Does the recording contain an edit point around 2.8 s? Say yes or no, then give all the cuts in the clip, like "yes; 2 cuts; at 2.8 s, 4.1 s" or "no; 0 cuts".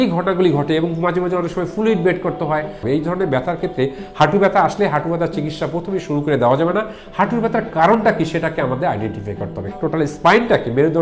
yes; 2 cuts; at 2.8 s, 9.7 s